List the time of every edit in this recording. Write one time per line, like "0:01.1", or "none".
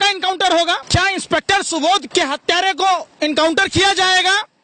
0:00.8
0:02.1